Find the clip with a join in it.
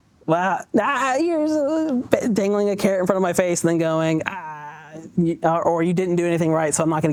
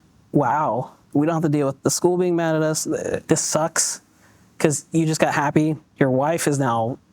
second; 3 cuts; at 1.0 s, 3.2 s, 5.8 s

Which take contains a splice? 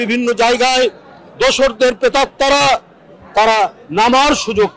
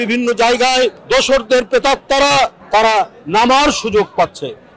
second; 2 cuts; at 1.0 s, 2.6 s

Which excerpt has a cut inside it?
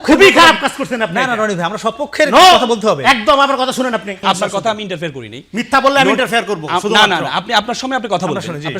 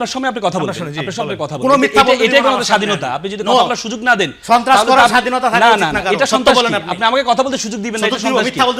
first; 1 cut; at 4.2 s

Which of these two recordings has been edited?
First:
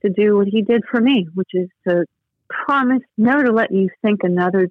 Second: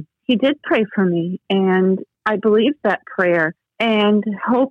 second; 2 cuts; at 2.1 s, 3.6 s

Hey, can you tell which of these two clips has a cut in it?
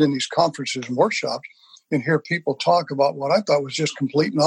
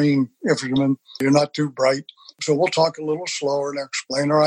second; 2 cuts; at 1.2 s, 2.3 s

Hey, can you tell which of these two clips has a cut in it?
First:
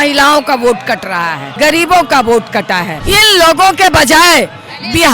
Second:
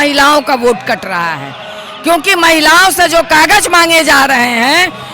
first; 2 cuts; at 1.4 s, 2.9 s

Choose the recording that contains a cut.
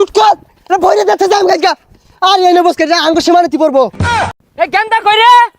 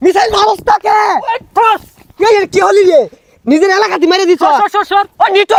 first; 1 cut; at 4.3 s

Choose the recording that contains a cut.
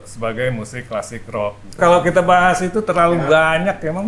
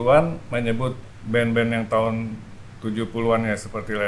first; 1 cut; at 1.8 s

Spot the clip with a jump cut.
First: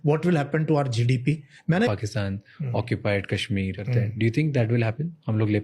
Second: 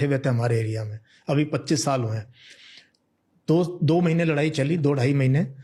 first; 2 cuts; at 1.9 s, 3.8 s

